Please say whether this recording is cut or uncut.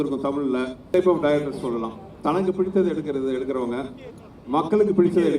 cut